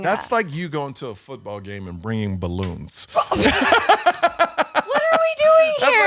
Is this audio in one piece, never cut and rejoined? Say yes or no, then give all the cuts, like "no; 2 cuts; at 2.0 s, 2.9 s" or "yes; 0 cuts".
yes; 0 cuts